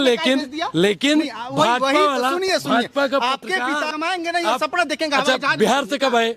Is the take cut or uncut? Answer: cut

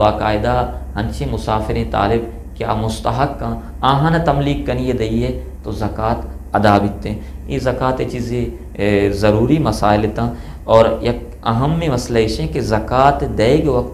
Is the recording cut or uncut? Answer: uncut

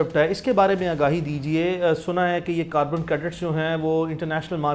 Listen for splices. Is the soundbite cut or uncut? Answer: uncut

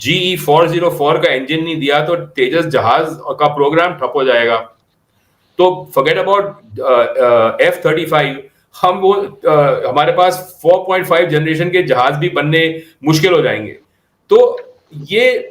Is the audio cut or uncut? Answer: uncut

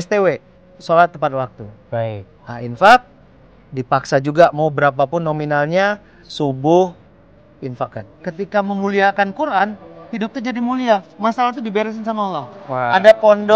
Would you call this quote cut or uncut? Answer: cut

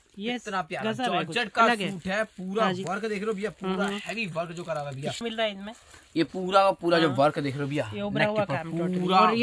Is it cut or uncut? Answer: cut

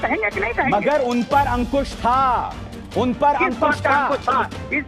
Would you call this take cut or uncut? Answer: cut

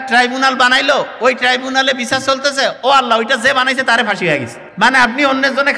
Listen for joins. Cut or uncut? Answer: cut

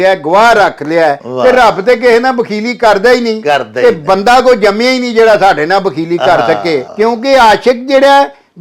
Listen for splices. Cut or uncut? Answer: cut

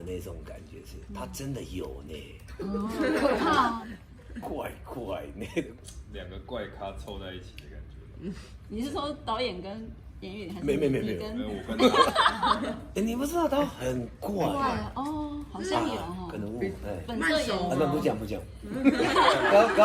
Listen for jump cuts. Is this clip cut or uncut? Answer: cut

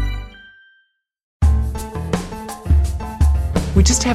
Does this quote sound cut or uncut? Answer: cut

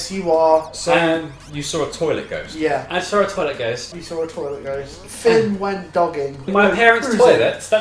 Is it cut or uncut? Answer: cut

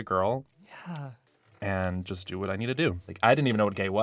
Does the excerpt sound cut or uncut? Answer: cut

